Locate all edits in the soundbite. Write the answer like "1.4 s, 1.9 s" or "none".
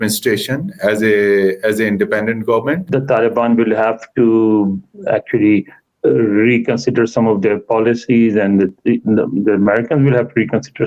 2.8 s